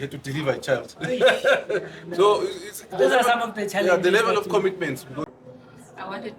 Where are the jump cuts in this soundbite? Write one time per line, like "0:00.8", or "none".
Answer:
0:05.3